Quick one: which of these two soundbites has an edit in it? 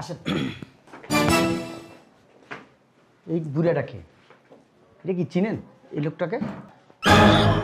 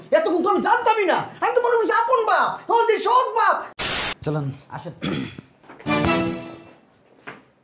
second; 1 cut; at 3.8 s

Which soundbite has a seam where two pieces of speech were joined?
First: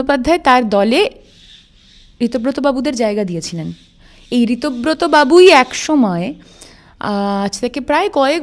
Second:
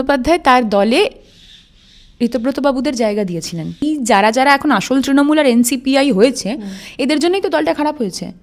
second; 1 cut; at 3.8 s

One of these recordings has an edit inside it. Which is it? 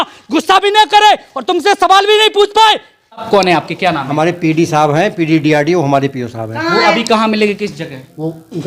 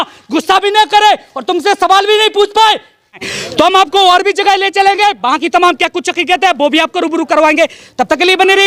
first; 1 cut; at 3.2 s

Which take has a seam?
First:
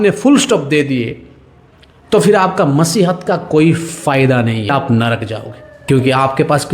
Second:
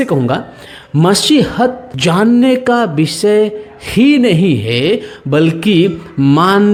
first; 2 cuts; at 4.7 s, 5.7 s

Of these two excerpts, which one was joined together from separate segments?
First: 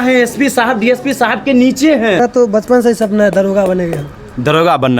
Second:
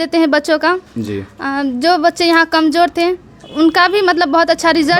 first; 1 cut; at 2.2 s

